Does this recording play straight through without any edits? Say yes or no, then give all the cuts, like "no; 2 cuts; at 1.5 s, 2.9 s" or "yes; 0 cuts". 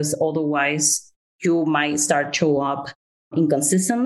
yes; 0 cuts